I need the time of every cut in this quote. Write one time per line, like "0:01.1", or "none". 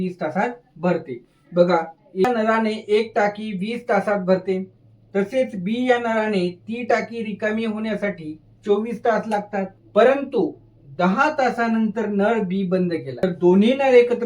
0:02.2
0:09.8
0:13.2